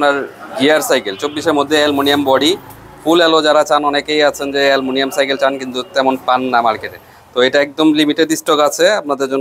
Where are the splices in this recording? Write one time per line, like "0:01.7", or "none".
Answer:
none